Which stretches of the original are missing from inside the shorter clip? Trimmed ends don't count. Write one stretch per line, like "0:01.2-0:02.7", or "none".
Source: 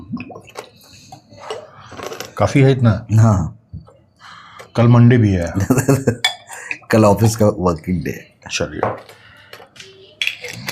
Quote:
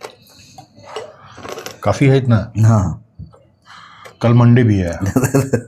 none